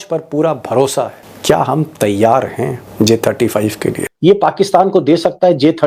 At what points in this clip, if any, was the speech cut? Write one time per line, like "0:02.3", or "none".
0:01.2
0:04.1